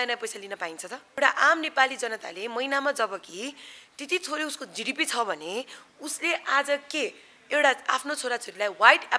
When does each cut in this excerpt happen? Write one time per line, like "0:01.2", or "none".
0:01.0